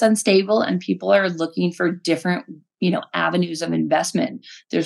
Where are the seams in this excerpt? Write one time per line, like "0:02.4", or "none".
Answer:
none

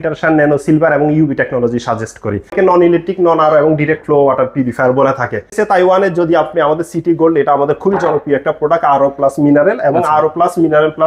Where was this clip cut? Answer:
0:02.5
0:05.5

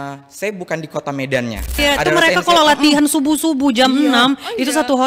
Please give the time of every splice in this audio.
0:01.8

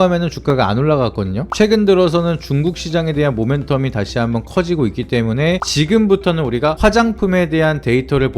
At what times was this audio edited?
0:01.5
0:05.6

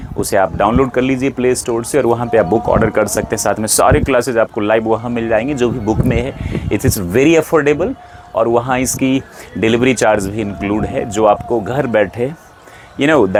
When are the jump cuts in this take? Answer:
none

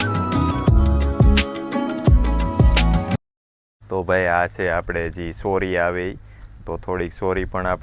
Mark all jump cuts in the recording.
0:03.2

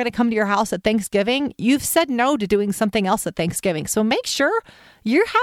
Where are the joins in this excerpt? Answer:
none

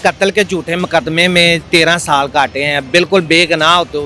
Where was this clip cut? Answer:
0:01.6

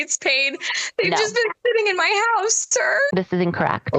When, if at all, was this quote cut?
0:03.1

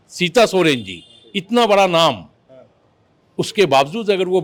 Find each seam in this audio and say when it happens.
none

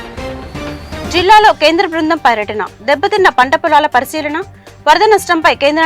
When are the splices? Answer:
0:01.0

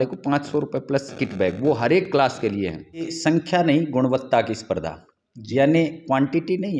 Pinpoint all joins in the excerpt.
0:03.1

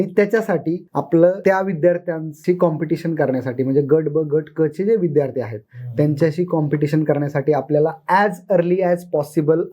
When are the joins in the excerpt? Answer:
0:00.9
0:01.4
0:02.3

